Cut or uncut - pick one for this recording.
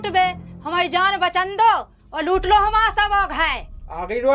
uncut